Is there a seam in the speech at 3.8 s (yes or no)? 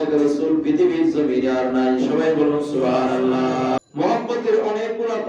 yes